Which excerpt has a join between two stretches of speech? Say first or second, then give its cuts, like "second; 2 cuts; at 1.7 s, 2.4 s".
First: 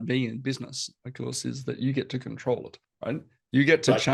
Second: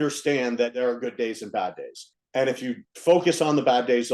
second; 2 cuts; at 0.7 s, 2.1 s